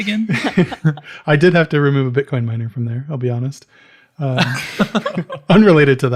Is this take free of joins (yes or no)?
yes